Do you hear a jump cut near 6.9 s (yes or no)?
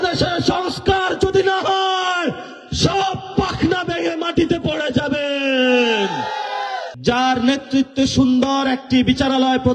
yes